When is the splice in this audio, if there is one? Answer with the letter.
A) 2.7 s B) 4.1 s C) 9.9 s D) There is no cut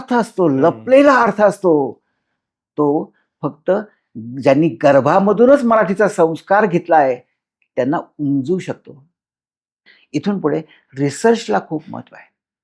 C